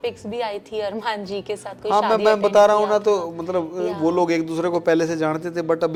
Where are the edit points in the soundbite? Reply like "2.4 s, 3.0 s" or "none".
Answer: none